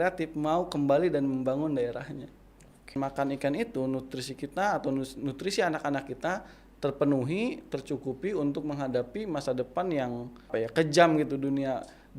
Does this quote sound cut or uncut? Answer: cut